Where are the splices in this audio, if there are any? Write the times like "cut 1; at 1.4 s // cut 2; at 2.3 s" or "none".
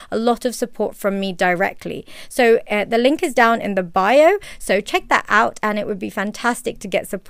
cut 1; at 4.5 s

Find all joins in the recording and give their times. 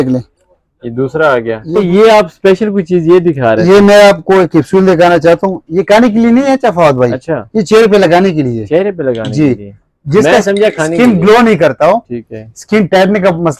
cut 1; at 1.6 s

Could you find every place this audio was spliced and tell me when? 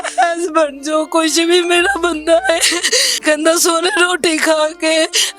cut 1; at 3.1 s

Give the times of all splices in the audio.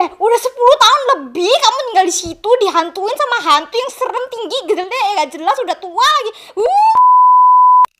cut 1; at 6.9 s

